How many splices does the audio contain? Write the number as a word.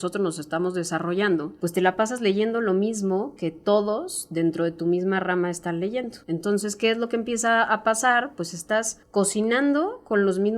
three